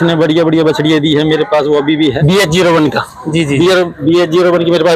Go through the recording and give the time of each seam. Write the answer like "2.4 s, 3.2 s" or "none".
2.2 s